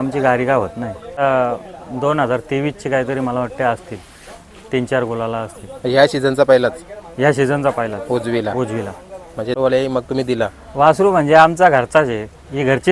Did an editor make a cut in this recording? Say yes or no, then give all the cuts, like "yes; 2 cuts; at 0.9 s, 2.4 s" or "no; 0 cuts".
yes; 2 cuts; at 1.2 s, 9.5 s